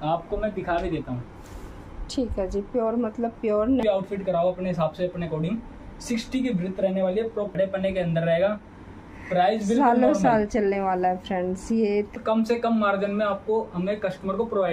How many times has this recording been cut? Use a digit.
3